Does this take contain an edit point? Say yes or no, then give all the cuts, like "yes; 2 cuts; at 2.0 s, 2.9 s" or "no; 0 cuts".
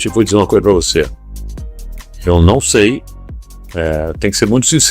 yes; 1 cut; at 2.3 s